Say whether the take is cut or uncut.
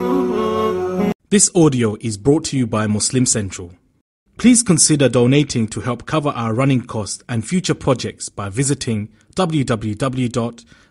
cut